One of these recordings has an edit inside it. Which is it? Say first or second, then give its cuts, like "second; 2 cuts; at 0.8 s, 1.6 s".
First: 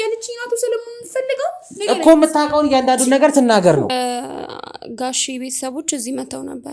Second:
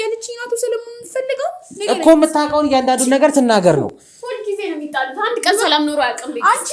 first; 1 cut; at 3.9 s